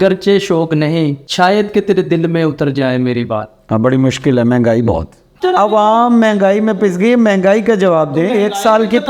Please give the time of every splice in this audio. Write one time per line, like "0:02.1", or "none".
0:01.2
0:05.4